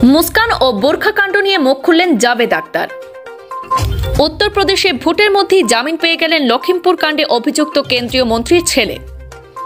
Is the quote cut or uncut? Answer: cut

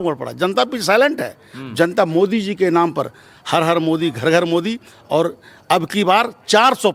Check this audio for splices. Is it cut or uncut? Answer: uncut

